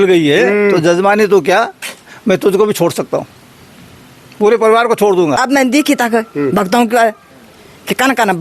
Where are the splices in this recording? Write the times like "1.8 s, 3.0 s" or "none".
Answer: 5.4 s